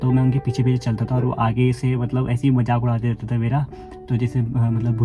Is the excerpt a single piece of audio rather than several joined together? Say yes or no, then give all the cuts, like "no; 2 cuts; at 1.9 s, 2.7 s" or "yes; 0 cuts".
yes; 0 cuts